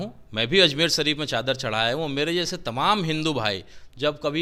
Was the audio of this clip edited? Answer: no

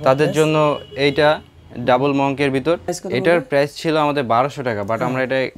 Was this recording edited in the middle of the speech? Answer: yes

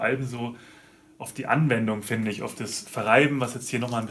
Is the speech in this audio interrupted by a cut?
no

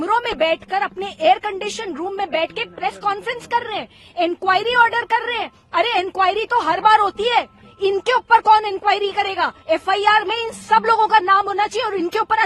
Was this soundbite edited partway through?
no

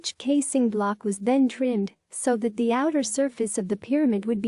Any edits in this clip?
yes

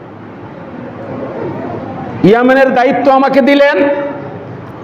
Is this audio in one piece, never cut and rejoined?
yes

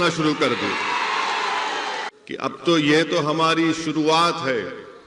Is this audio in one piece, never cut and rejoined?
no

